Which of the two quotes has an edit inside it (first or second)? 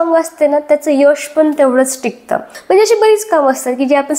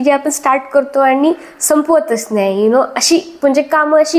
first